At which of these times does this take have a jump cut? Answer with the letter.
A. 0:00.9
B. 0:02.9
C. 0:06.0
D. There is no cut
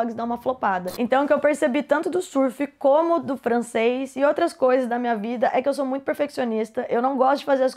A